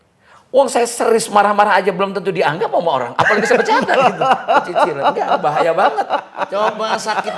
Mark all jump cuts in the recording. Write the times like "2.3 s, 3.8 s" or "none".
6.3 s